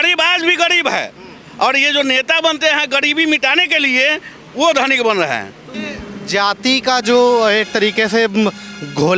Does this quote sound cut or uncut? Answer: uncut